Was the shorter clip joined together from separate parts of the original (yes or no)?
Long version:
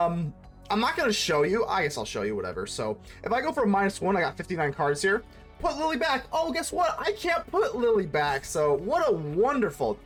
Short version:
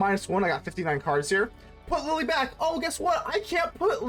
no